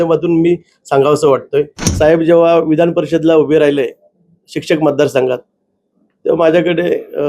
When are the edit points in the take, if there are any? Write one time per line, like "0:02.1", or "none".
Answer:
0:01.8

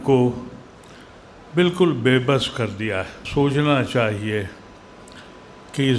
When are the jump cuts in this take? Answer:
0:03.2

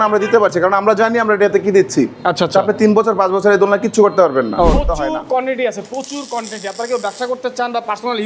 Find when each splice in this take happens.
0:04.8

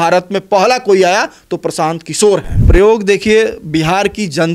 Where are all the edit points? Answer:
0:02.6

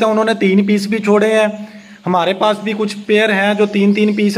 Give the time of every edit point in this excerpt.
none

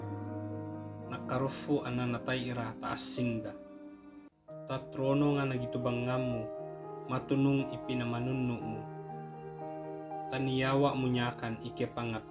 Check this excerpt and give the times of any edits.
0:01.3
0:08.6
0:10.3

